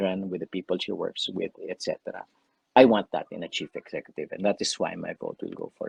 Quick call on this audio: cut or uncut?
uncut